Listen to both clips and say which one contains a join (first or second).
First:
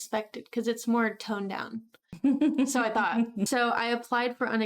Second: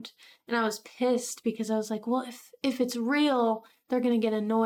first